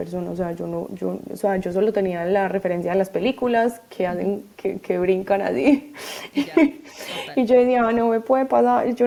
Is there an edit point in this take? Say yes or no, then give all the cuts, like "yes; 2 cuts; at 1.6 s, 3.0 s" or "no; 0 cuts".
no; 0 cuts